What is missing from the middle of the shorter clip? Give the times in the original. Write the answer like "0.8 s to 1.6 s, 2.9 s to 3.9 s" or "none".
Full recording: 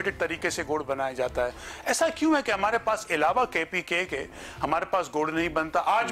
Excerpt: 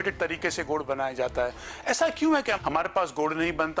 2.6 s to 4.5 s